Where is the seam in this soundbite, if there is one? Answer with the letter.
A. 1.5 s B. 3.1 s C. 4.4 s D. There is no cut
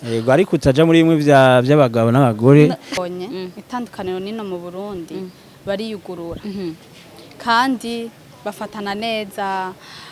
B